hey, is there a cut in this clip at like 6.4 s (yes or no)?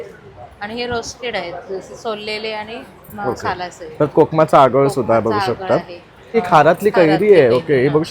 yes